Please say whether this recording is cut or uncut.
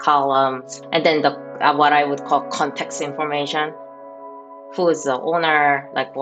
uncut